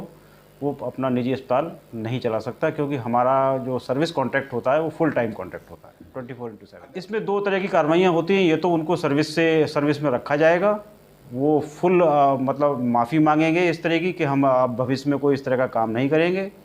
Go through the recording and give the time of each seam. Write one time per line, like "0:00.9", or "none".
0:06.7